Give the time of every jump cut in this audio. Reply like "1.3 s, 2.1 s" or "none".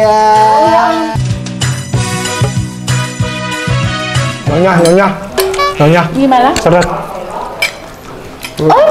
4.5 s